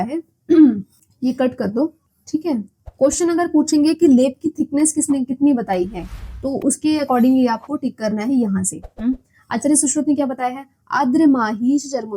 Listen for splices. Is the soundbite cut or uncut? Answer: uncut